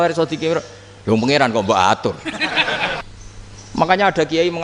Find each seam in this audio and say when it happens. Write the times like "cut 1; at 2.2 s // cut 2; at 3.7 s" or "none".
cut 1; at 3.0 s

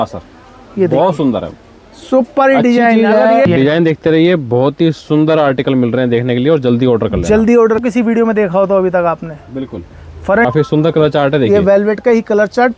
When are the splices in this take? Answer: cut 1; at 3.5 s // cut 2; at 7.8 s // cut 3; at 10.5 s

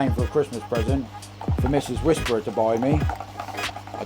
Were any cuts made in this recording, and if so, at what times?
none

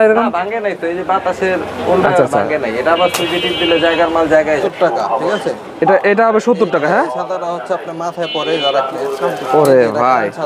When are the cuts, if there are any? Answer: cut 1; at 4.6 s // cut 2; at 8.9 s

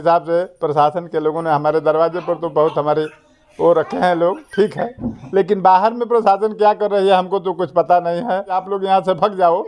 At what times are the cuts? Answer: cut 1; at 8.6 s

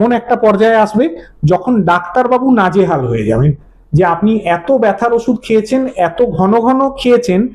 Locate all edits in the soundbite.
none

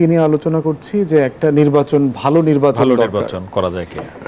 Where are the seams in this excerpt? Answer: none

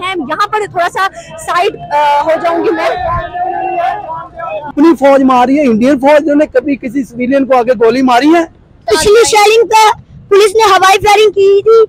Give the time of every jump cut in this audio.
cut 1; at 4.7 s // cut 2; at 8.9 s

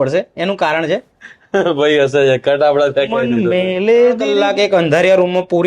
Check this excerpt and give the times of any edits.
cut 1; at 4.3 s

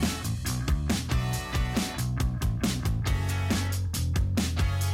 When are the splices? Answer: cut 1; at 2.2 s

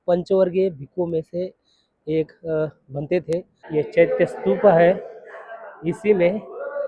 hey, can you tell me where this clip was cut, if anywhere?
cut 1; at 3.6 s

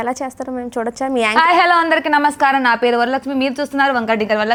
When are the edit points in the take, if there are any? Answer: none

